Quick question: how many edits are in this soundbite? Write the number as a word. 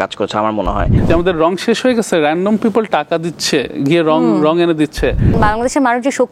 two